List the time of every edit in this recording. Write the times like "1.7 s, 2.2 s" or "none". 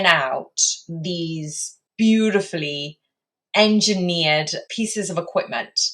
1.8 s, 4.6 s